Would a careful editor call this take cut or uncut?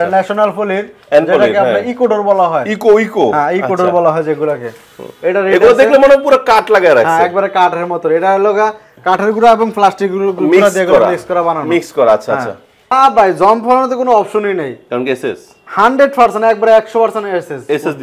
cut